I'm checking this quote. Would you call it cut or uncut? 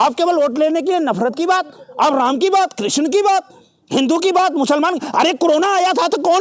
uncut